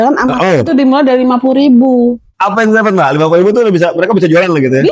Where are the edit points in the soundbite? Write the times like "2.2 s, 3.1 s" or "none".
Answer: 2.3 s